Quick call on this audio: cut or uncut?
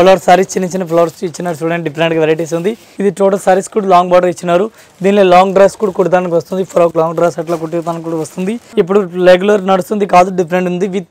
cut